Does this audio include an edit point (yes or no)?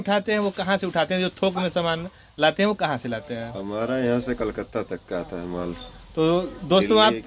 no